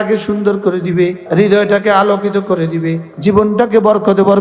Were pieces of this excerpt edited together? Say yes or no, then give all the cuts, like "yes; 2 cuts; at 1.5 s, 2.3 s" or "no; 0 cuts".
yes; 2 cuts; at 1.2 s, 3.1 s